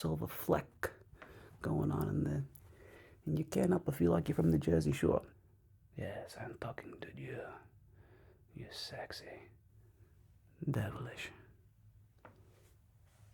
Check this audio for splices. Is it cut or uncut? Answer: cut